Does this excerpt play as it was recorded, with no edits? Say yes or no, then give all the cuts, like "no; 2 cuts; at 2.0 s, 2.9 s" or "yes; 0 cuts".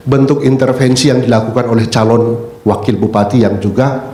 yes; 0 cuts